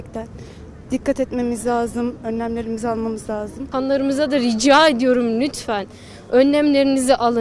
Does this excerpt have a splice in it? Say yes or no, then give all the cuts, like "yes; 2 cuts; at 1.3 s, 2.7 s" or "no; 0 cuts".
yes; 1 cut; at 3.7 s